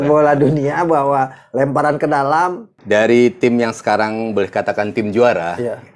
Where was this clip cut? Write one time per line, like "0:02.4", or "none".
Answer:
0:02.7

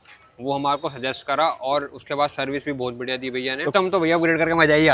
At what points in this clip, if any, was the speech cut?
0:03.7

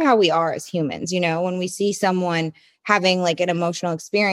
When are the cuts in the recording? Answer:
none

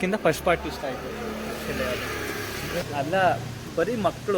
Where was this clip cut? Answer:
0:02.8

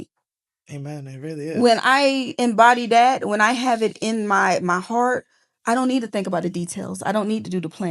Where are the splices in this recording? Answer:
none

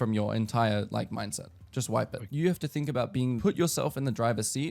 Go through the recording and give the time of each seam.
0:02.2
0:03.4

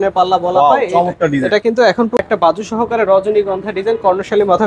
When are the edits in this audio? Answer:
0:02.2

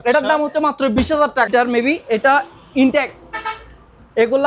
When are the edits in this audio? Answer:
0:01.5

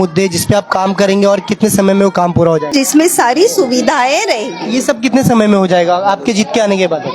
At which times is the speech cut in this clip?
0:02.7

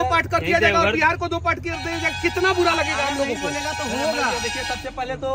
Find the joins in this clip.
none

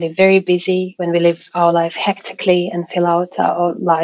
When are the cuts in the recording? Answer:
0:00.9

